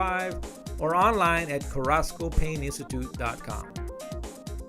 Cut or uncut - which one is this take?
cut